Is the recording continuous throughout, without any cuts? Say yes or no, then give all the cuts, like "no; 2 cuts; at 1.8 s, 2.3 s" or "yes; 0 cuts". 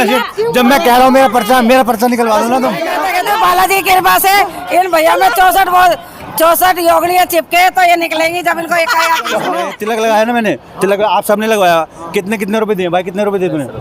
no; 2 cuts; at 2.9 s, 9.7 s